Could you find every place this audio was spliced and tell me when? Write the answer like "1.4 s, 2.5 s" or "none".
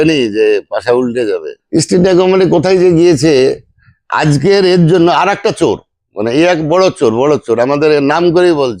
1.5 s